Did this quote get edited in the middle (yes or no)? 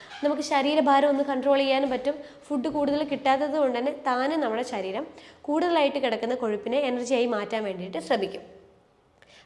no